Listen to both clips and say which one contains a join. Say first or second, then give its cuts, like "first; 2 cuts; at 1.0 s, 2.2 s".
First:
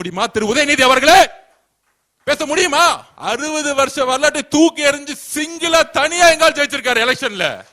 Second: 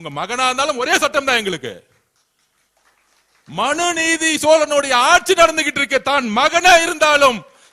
first; 1 cut; at 3.1 s